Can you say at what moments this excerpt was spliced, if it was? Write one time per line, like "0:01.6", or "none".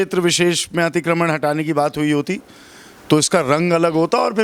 none